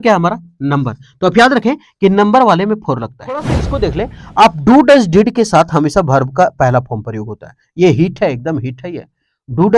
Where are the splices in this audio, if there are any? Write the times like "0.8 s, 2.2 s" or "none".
3.6 s